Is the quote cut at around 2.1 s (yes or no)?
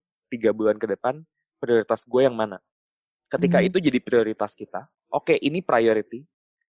no